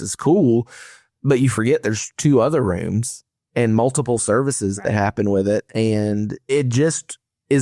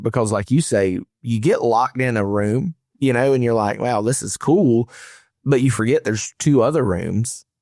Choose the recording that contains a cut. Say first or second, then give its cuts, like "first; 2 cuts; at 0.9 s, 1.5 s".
first; 1 cut; at 6.5 s